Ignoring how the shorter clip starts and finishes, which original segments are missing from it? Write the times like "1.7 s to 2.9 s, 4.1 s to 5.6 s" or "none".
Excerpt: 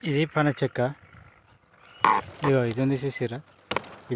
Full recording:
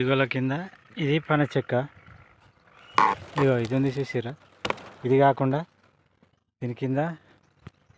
none